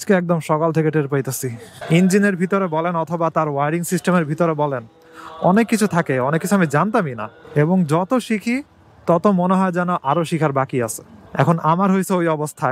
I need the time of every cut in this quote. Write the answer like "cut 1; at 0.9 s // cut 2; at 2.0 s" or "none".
cut 1; at 1.7 s // cut 2; at 11.1 s